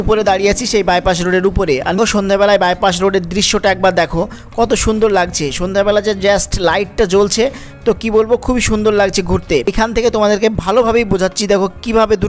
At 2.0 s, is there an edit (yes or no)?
yes